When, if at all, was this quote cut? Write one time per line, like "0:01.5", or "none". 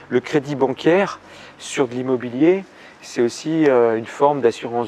none

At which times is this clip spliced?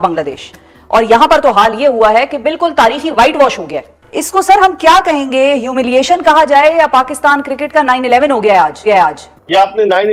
none

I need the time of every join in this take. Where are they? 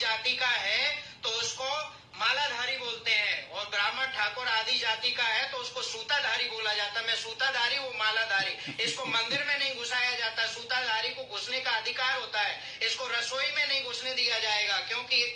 none

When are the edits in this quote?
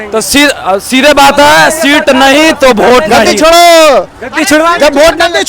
0:03.3

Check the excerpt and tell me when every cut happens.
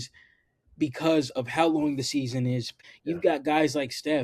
0:02.7

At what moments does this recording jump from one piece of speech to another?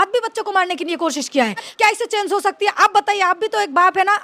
0:01.7

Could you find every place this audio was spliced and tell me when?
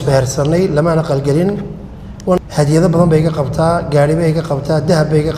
0:02.4

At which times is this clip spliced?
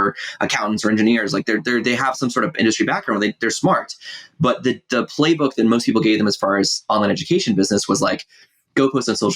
none

